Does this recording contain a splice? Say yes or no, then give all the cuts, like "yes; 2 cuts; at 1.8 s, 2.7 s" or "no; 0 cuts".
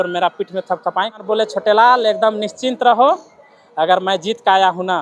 yes; 1 cut; at 1.2 s